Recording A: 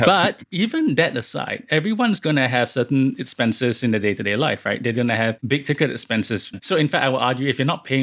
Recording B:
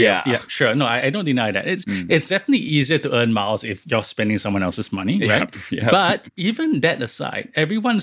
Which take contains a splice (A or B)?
A